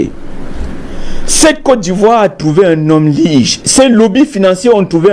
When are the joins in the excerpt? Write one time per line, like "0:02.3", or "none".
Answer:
none

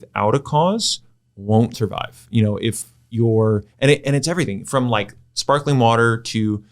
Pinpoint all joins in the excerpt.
0:01.8
0:02.8

